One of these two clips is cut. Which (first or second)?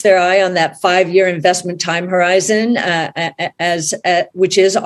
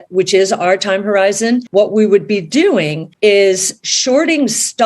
second